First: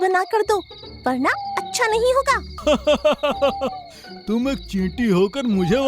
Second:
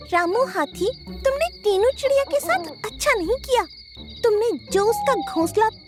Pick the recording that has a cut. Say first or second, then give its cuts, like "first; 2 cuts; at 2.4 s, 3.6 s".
first; 1 cut; at 2.5 s